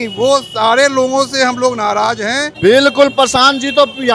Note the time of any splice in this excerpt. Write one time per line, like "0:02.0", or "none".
0:02.4